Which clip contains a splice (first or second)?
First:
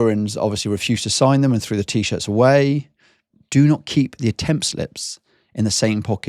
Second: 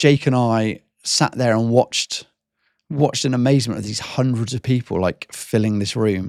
first